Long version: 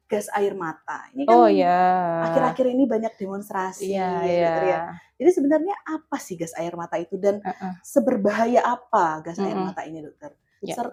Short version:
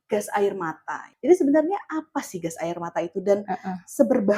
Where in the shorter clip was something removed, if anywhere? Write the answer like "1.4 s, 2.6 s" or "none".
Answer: 1.0 s